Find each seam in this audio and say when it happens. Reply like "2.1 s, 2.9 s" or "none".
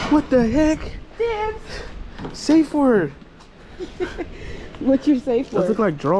none